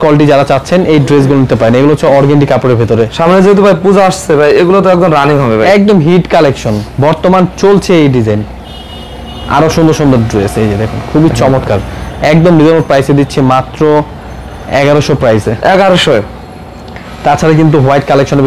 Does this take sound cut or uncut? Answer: uncut